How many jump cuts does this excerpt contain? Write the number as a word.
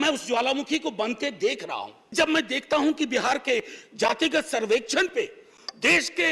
one